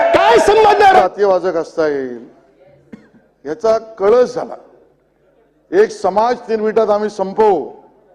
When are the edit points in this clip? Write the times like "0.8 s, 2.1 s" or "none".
1.0 s

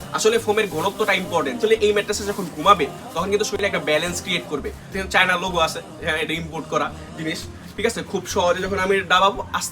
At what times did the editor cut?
4.8 s

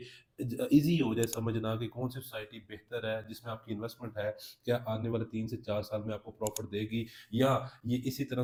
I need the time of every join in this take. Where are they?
none

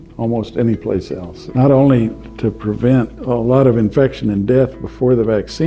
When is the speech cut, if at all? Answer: 3.2 s

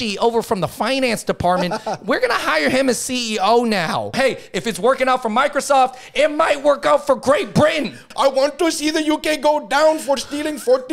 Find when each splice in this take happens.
4.1 s, 8.0 s

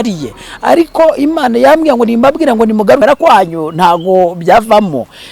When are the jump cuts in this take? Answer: 3.0 s

